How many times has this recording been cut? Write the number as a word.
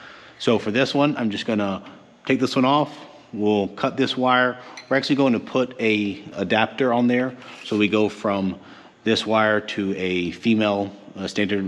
one